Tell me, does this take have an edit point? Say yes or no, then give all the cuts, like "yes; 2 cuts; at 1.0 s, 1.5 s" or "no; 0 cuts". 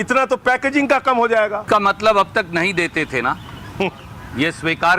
yes; 1 cut; at 1.6 s